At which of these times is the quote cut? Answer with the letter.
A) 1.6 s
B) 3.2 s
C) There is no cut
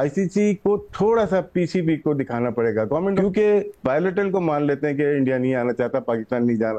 B